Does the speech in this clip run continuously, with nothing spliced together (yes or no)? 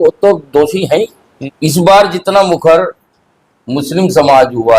no